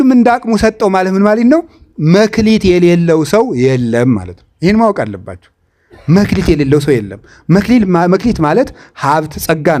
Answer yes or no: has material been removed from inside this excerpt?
no